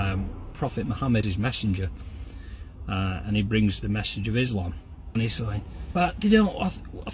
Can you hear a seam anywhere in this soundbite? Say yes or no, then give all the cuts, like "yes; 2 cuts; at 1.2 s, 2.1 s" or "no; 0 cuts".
yes; 3 cuts; at 1.2 s, 5.1 s, 5.8 s